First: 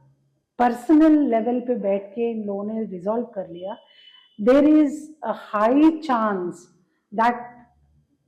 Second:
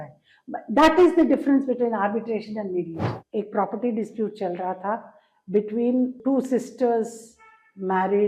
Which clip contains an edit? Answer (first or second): second